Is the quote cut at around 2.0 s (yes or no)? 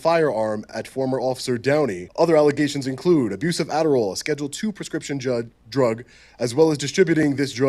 yes